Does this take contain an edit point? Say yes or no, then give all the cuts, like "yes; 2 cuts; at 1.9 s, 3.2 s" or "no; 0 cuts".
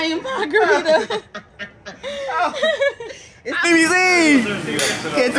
yes; 1 cut; at 3.7 s